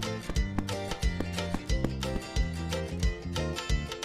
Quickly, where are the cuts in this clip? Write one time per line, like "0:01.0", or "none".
none